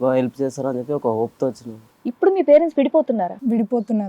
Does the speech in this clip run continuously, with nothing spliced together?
no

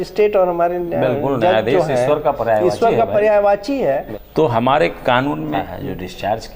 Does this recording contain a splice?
yes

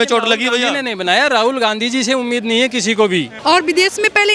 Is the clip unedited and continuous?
no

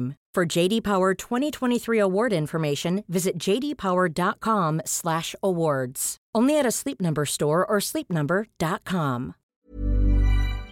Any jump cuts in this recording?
yes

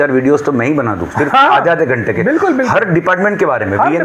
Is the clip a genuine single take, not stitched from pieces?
yes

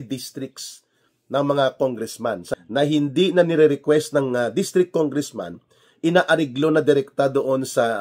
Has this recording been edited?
yes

